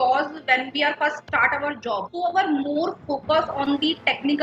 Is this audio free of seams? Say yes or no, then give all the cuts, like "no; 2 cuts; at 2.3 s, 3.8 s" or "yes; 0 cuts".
no; 2 cuts; at 1.2 s, 2.1 s